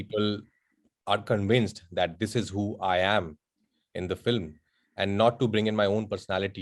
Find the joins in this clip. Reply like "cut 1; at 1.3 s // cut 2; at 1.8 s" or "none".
none